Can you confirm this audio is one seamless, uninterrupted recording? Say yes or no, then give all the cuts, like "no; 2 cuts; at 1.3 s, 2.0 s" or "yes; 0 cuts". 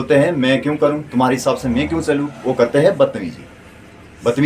yes; 0 cuts